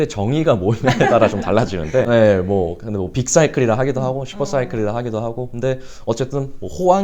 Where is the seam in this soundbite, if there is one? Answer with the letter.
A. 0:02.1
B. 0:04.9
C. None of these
A